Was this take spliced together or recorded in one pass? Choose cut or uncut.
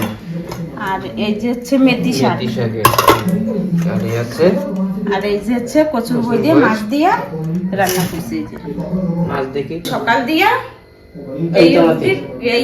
cut